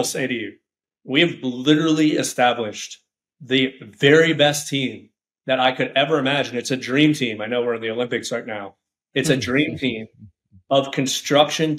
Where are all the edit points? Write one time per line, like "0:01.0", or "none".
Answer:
none